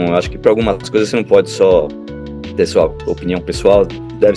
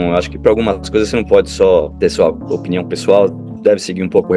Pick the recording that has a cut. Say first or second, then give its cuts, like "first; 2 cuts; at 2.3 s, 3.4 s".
second; 1 cut; at 1.9 s